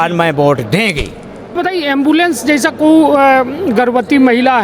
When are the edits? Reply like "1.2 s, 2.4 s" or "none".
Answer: 1.6 s